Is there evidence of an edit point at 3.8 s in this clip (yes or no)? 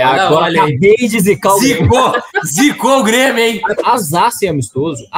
yes